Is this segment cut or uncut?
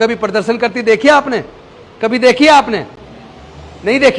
uncut